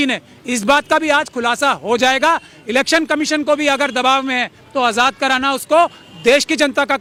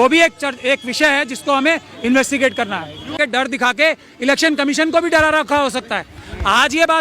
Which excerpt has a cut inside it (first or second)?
second